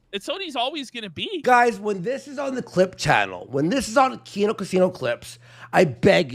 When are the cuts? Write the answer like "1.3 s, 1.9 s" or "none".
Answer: 1.4 s